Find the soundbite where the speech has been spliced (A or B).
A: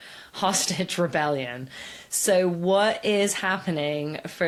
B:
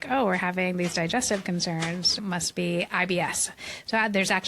B